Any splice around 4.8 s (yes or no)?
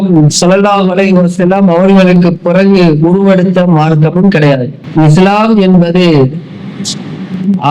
yes